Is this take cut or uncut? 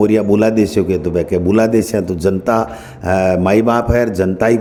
uncut